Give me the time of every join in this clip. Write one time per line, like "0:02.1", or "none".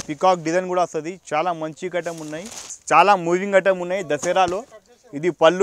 0:02.7